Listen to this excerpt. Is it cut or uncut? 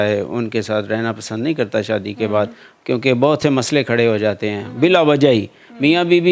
uncut